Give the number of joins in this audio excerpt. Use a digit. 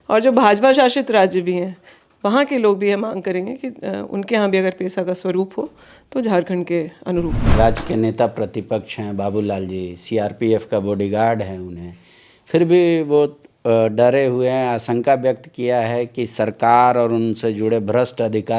1